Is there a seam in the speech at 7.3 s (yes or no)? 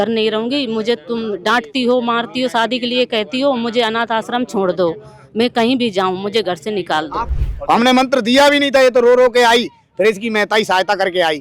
yes